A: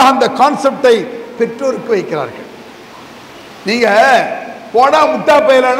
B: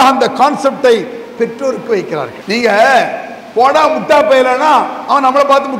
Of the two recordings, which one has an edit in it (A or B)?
B